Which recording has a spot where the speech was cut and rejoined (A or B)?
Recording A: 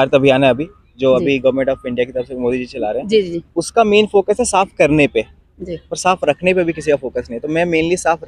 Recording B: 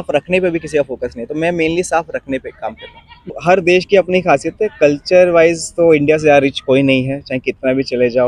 B